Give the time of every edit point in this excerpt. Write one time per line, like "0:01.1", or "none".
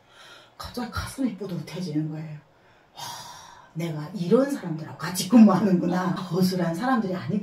0:06.2